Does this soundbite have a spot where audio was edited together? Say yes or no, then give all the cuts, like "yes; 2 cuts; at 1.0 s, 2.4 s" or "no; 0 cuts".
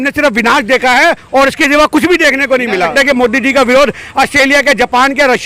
yes; 1 cut; at 2.9 s